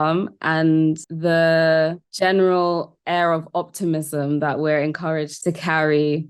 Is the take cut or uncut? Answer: cut